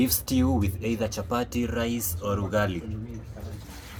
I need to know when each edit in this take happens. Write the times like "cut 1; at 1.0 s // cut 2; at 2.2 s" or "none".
none